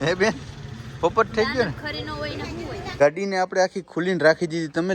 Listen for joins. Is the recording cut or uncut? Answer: cut